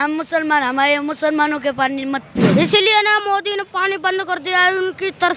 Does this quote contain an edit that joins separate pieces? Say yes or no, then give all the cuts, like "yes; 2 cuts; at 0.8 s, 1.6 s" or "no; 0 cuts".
yes; 1 cut; at 2.5 s